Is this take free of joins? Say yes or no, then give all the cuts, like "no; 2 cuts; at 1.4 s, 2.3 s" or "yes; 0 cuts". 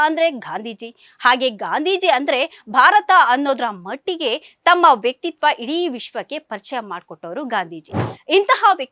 yes; 0 cuts